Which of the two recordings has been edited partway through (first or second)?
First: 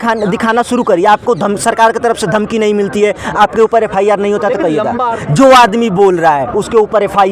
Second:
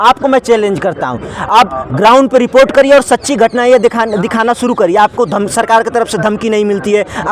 first